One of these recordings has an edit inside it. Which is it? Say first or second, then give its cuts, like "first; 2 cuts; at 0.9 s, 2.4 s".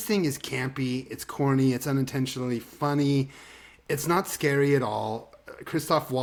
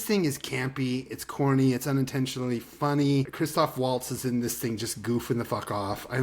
second; 1 cut; at 3.3 s